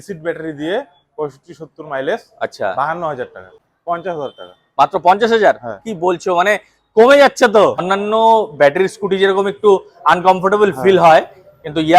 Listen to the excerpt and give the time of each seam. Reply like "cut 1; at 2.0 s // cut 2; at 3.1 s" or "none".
cut 1; at 3.6 s // cut 2; at 7.8 s